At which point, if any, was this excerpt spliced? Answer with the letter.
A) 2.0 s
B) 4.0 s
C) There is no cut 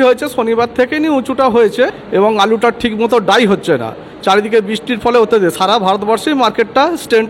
A